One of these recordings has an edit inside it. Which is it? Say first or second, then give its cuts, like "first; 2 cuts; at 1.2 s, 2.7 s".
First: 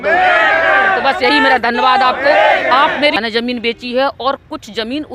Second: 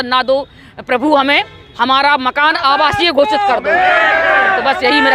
first; 1 cut; at 3.2 s